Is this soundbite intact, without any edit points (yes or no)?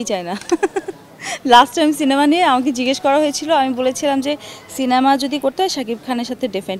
yes